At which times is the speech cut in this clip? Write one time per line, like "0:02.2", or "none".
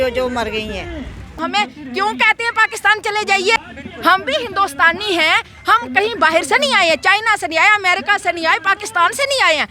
0:01.4
0:03.6